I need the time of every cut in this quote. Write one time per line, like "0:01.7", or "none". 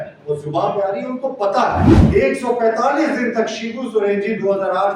0:02.0